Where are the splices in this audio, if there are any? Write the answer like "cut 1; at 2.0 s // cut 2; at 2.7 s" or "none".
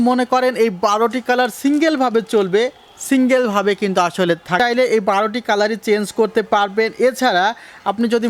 cut 1; at 4.6 s